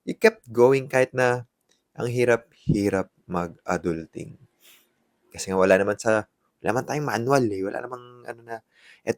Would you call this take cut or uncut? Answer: uncut